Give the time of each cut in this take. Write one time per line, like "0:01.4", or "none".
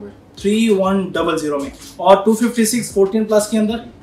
none